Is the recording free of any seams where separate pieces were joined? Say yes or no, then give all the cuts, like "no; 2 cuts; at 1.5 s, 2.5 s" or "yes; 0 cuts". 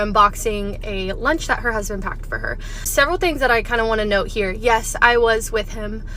yes; 0 cuts